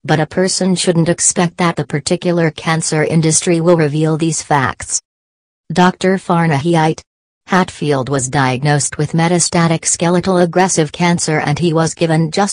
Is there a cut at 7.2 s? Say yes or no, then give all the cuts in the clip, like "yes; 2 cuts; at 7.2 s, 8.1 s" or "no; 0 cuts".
yes; 1 cut; at 7.2 s